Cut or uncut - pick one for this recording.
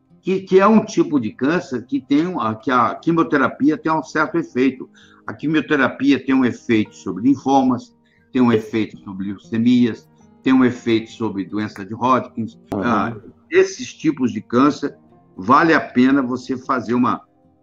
cut